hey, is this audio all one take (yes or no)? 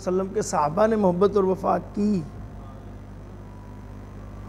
yes